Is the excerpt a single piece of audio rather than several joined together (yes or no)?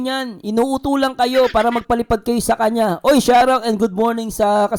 yes